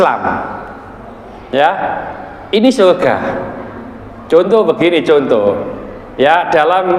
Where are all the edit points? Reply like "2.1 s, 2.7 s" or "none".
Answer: none